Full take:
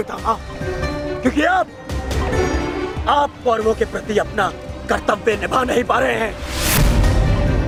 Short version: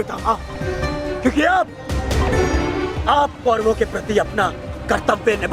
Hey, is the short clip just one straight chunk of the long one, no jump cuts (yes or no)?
yes